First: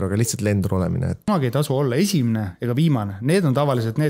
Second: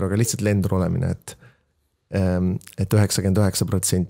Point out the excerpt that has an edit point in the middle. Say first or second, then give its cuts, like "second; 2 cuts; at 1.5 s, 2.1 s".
first; 1 cut; at 1.3 s